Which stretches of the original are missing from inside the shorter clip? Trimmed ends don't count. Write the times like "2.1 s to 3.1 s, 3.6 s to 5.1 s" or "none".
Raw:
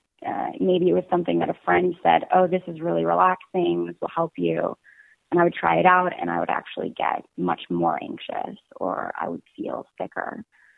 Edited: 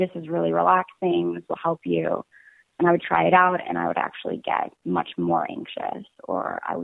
none